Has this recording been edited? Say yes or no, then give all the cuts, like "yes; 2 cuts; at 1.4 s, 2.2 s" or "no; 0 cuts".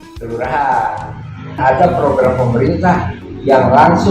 yes; 1 cut; at 1.6 s